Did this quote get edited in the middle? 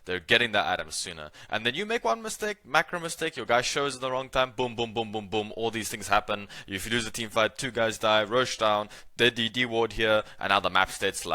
no; 0 cuts

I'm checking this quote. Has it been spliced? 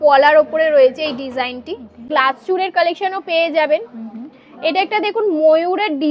yes; 1 cut; at 2.1 s

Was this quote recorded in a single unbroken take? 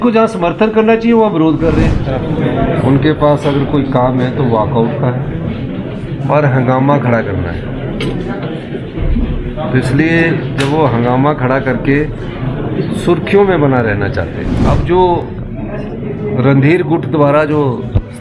no; 2 cuts; at 2.0 s, 14.5 s

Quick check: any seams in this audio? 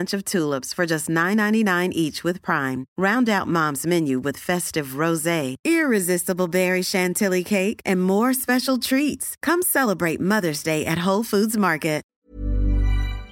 yes; 1 cut; at 12.1 s

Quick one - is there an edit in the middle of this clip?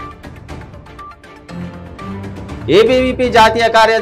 no; 0 cuts

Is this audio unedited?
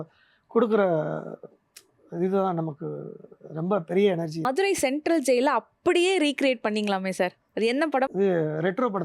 no; 2 cuts; at 4.5 s, 8.1 s

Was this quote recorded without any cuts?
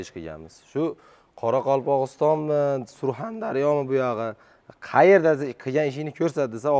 yes; 0 cuts

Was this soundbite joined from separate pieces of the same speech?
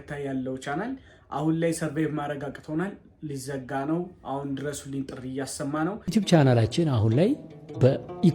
yes; 1 cut; at 6.0 s

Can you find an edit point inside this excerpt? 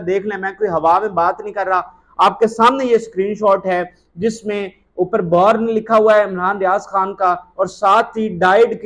no; 0 cuts

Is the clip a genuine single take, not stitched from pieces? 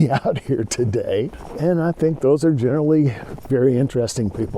no; 2 cuts; at 1.4 s, 3.3 s

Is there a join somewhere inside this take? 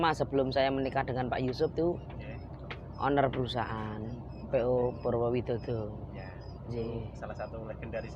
no; 0 cuts

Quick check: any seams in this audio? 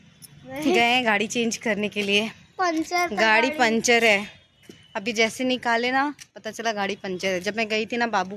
no; 0 cuts

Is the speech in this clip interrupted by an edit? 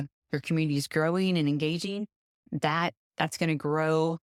no; 0 cuts

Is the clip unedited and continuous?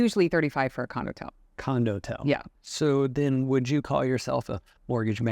no; 1 cut; at 2.6 s

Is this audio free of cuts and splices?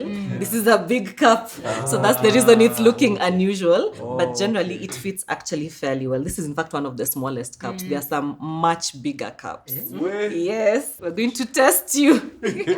no; 1 cut; at 10.9 s

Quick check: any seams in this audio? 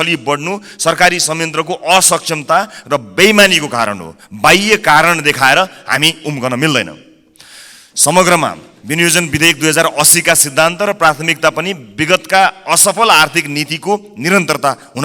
no; 0 cuts

